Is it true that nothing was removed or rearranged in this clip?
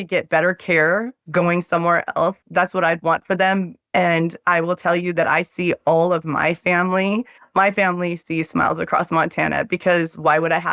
yes; 0 cuts

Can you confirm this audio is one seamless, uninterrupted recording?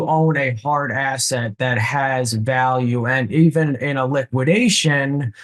yes; 0 cuts

